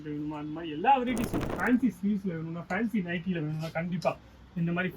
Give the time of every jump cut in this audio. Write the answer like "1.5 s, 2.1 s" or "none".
1.5 s